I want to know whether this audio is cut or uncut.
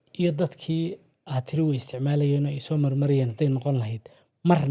uncut